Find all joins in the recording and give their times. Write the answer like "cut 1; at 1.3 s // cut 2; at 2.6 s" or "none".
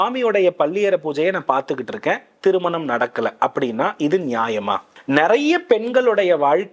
cut 1; at 4.9 s